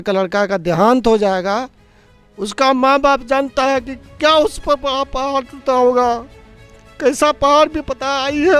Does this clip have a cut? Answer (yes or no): no